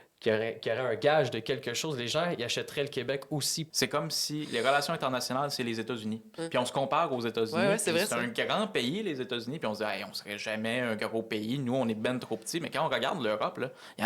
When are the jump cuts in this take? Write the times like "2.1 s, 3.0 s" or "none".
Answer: 3.6 s